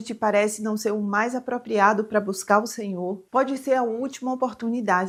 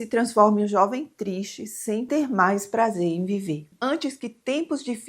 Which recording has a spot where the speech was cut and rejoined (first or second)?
second